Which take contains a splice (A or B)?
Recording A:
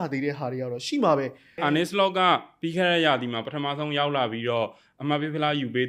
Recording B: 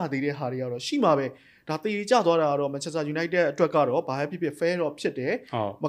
A